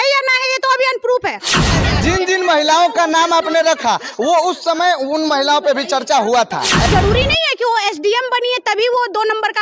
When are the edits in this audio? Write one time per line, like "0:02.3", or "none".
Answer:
0:01.7
0:06.9